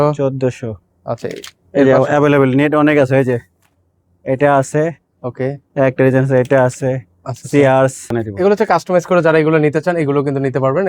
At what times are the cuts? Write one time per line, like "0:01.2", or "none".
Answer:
0:08.3